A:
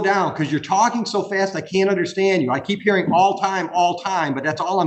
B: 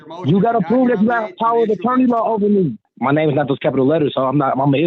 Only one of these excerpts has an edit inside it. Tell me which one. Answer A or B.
B